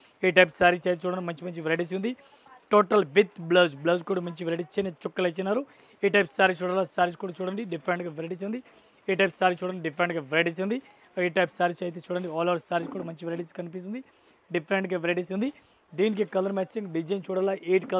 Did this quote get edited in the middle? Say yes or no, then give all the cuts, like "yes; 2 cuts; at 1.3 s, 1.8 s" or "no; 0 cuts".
no; 0 cuts